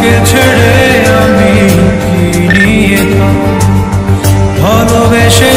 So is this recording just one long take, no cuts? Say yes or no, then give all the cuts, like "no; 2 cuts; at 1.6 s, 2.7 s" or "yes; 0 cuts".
yes; 0 cuts